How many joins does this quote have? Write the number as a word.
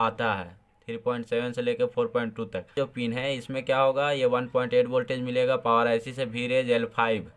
one